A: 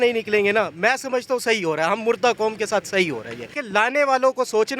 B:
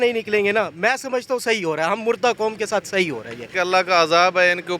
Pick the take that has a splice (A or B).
B